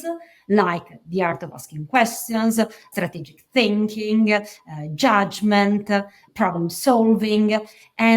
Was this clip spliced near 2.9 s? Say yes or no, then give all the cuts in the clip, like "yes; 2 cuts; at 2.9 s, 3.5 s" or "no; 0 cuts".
yes; 2 cuts; at 2.9 s, 6.2 s